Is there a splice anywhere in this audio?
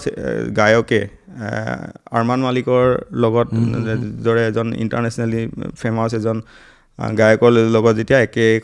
no; 0 cuts

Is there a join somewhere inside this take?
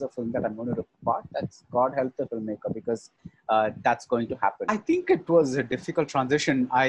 yes; 1 cut; at 4.7 s

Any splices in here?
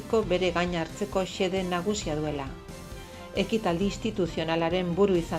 no; 0 cuts

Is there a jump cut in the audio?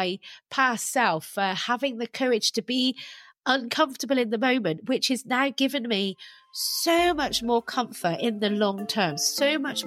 no; 0 cuts

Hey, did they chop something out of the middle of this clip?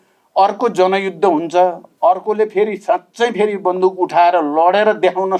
yes; 1 cut; at 1.9 s

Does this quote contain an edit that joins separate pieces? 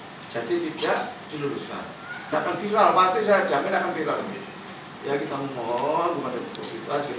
yes; 1 cut; at 2.3 s

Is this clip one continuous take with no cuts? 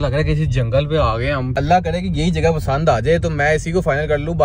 no; 1 cut; at 1.6 s

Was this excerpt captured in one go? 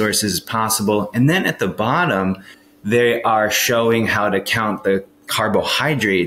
no; 1 cut; at 2.5 s

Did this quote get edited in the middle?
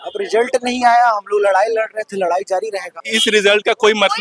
yes; 1 cut; at 3.0 s

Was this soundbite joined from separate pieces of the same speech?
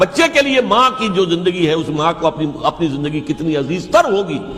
no; 0 cuts

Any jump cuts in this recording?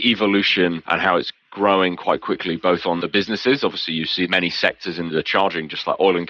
yes; 3 cuts; at 0.9 s, 3.0 s, 4.3 s

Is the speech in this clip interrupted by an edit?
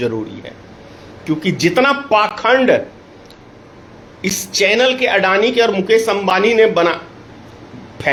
no; 0 cuts

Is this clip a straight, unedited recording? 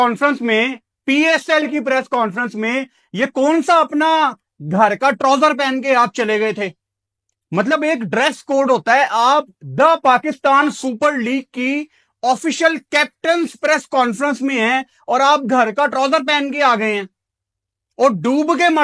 yes; 0 cuts

